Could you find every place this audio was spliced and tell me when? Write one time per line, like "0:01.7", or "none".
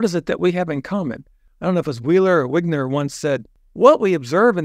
0:01.5
0:03.6